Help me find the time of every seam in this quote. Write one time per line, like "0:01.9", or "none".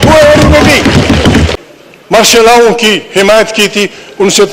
0:01.5